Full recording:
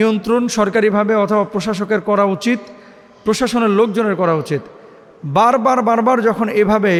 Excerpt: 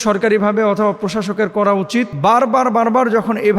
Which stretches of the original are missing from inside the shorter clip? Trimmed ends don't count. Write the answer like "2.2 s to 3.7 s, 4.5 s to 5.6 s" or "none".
2.6 s to 5.2 s